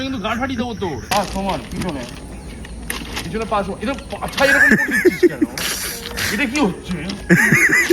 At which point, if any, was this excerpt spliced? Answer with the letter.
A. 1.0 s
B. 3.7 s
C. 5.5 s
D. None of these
A